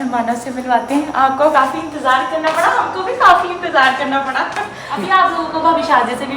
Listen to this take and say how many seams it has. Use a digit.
1